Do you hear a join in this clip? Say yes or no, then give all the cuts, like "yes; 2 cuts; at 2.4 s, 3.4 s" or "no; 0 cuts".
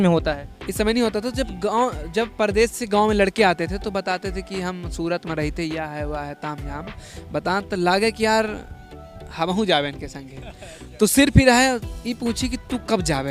no; 0 cuts